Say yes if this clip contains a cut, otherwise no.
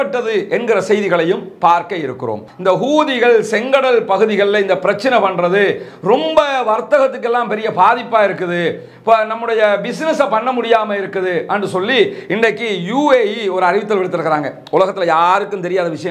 yes